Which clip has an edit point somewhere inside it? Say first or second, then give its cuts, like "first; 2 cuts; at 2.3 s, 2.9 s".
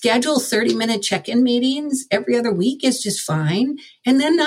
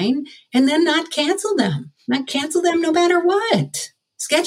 second; 1 cut; at 1.9 s